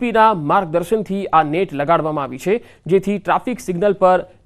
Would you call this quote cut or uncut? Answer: uncut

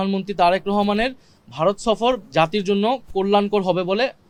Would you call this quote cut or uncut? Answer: uncut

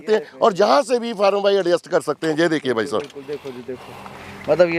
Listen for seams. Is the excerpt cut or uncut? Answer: uncut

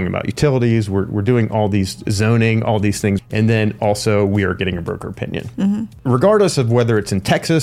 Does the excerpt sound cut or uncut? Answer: cut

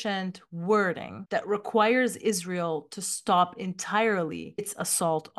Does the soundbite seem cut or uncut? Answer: uncut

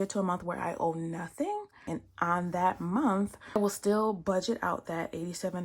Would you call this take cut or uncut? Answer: cut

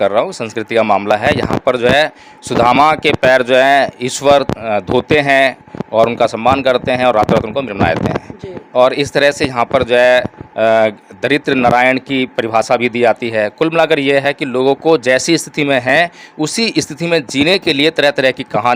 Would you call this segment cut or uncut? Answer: uncut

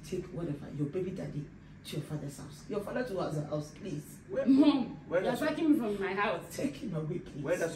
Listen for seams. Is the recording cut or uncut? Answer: uncut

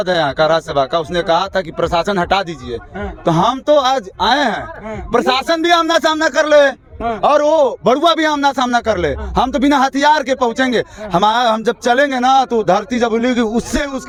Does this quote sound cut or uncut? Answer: uncut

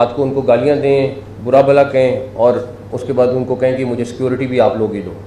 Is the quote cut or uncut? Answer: uncut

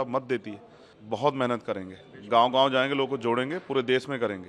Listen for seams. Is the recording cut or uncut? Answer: cut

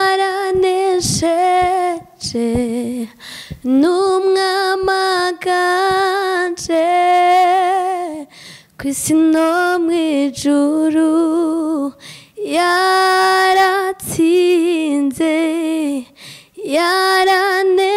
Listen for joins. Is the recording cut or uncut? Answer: uncut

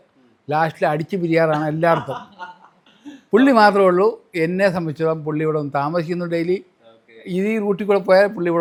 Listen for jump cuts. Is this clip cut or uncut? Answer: uncut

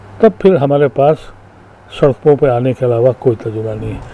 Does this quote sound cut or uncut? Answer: uncut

